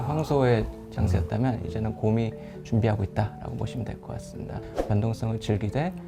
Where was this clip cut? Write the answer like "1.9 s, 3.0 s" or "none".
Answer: 4.7 s

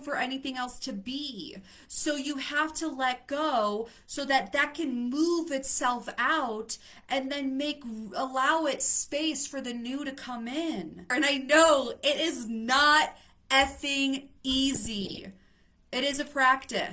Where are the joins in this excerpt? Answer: 11.1 s

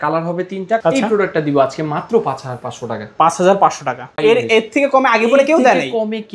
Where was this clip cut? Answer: 0.8 s, 4.2 s

